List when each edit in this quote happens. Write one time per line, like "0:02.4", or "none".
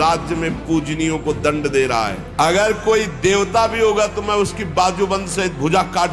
0:02.2